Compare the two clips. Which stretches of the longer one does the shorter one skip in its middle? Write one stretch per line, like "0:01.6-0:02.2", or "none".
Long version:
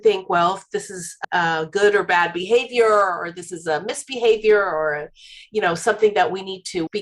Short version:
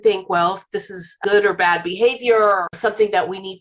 0:01.2-0:01.7
0:03.2-0:05.8